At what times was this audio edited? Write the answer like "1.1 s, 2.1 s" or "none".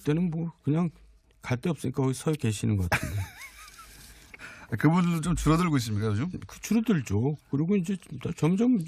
3.7 s